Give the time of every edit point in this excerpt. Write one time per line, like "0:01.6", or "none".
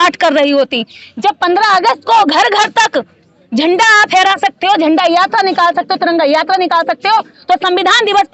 none